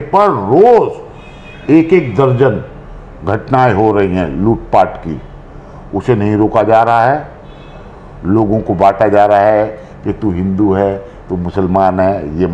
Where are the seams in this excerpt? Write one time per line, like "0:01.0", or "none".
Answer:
none